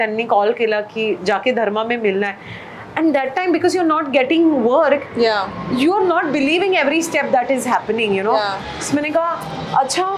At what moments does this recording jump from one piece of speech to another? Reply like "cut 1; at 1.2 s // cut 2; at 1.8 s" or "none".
none